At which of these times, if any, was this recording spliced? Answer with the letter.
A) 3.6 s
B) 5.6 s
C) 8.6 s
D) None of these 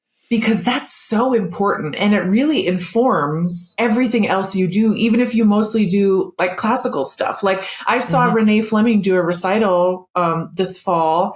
A